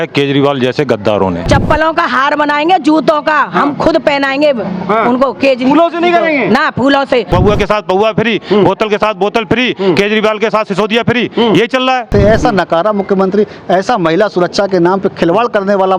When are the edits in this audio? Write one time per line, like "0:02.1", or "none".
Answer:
0:01.4
0:07.3
0:12.1